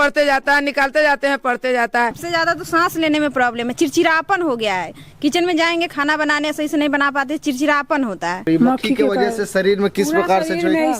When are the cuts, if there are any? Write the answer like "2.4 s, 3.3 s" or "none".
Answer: 2.2 s, 8.4 s